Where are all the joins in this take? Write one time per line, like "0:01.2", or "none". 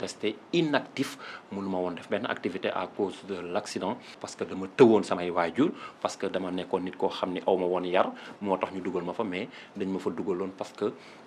0:04.2